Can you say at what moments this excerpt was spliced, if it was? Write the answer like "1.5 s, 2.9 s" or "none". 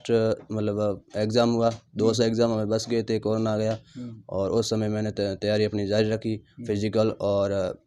none